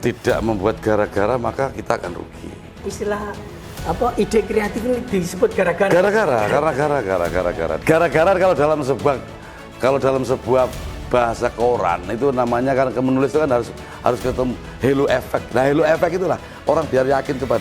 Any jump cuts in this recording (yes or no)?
yes